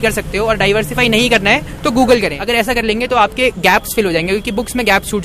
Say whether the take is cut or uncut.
cut